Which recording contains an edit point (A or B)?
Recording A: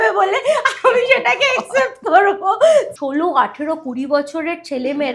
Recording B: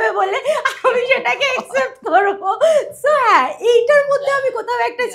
A